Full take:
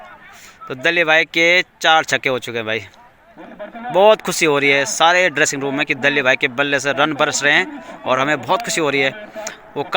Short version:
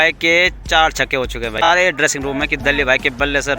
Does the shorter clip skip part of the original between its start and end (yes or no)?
yes